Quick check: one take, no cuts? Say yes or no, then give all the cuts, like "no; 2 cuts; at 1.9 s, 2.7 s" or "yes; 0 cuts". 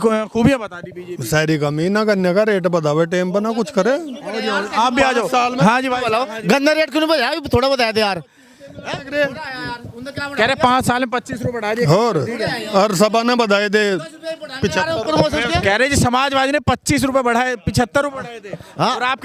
yes; 0 cuts